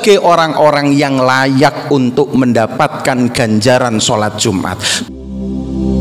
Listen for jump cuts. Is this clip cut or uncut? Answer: cut